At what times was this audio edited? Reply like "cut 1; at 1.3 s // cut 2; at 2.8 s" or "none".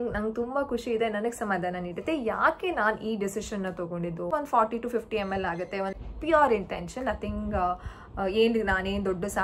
cut 1; at 4.3 s // cut 2; at 5.9 s